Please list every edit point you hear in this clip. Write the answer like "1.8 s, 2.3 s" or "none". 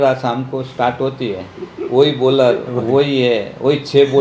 none

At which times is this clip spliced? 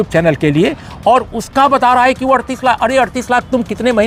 none

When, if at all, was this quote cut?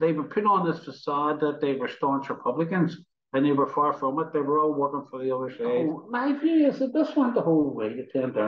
6.0 s

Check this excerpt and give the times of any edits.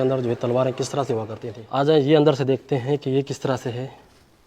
1.8 s

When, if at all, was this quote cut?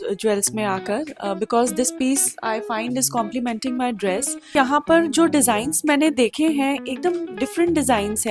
4.6 s

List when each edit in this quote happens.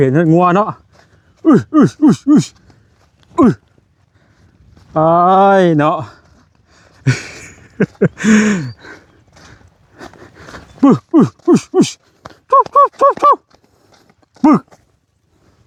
none

